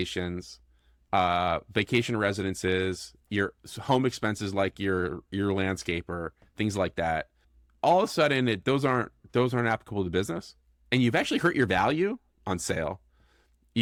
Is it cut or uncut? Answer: uncut